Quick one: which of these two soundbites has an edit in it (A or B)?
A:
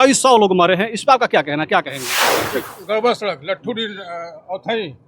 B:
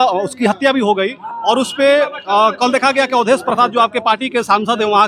A